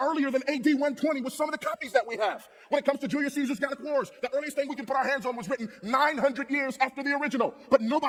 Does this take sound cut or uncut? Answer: uncut